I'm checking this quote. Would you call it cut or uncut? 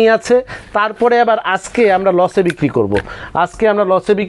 uncut